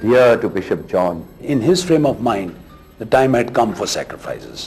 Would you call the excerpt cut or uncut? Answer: cut